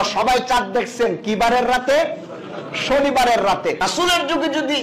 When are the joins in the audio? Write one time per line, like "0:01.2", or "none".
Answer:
0:03.8